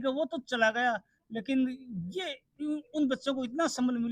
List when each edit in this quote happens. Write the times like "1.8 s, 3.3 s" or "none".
none